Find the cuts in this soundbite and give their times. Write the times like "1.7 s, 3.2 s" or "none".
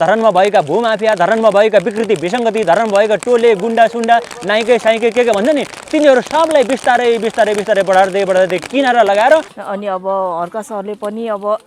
9.5 s